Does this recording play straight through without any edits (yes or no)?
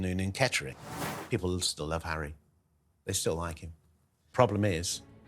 no